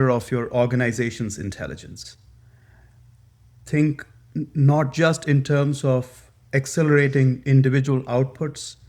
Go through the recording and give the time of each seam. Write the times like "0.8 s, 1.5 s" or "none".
none